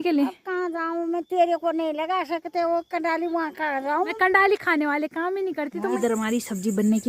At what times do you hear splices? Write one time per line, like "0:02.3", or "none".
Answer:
0:04.1
0:06.0